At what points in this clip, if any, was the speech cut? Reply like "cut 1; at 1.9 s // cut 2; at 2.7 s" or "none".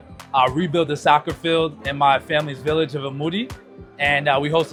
none